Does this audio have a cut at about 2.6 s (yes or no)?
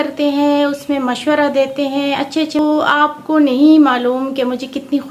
yes